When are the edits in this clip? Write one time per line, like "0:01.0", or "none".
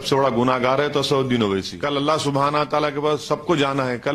0:01.7

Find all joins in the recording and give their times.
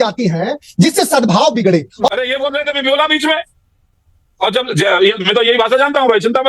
0:02.1

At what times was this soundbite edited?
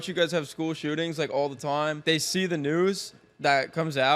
0:02.0

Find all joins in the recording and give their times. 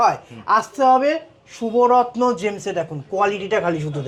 none

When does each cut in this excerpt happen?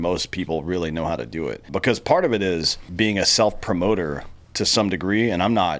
0:01.7
0:02.8

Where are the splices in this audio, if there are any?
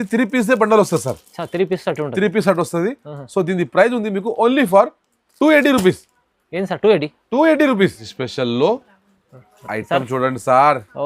0:08.1

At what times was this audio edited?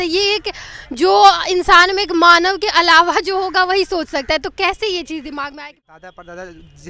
0:05.5

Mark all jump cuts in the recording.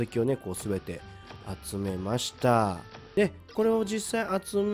none

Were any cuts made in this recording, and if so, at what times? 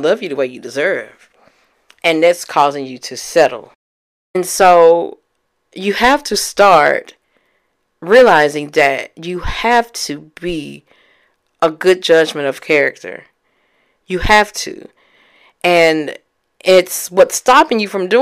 0:04.4

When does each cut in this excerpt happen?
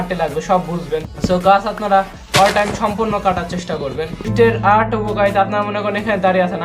0:01.1
0:04.2

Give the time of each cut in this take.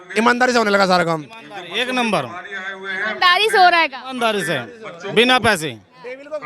none

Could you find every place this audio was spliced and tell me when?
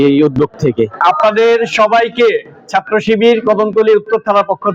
0:01.0

